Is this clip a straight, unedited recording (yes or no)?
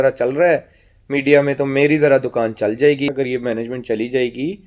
no